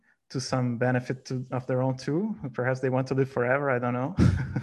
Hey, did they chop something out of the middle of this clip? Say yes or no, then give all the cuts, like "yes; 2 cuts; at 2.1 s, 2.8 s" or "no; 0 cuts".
no; 0 cuts